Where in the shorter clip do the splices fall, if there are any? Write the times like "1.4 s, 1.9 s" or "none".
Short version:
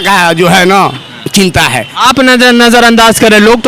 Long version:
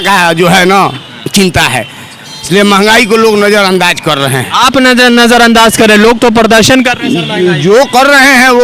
1.9 s